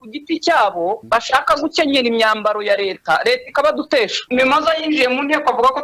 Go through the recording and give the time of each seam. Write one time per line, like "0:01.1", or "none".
0:01.0
0:04.2